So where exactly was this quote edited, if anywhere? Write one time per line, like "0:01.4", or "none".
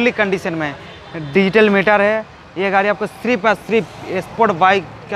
none